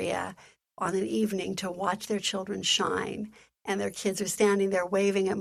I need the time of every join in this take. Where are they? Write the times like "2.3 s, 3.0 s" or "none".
none